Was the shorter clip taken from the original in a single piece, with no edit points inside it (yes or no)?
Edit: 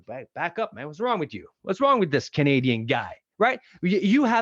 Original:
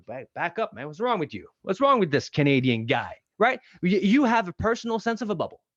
yes